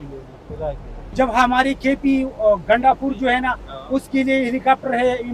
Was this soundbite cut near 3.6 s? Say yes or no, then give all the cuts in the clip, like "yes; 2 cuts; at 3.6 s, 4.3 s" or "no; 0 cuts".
no; 1 cut; at 1.0 s